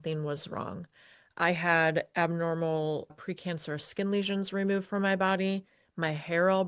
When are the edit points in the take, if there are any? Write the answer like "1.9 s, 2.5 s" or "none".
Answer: none